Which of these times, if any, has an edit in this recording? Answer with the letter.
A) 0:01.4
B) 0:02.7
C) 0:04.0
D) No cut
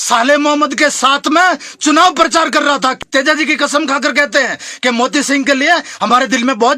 B